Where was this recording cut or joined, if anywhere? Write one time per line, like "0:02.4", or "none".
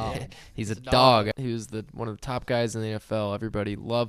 0:01.3